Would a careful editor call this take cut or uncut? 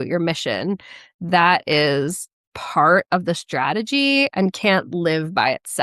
uncut